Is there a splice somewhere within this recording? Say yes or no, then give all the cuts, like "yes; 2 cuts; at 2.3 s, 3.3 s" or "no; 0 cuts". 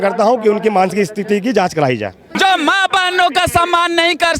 yes; 1 cut; at 2.3 s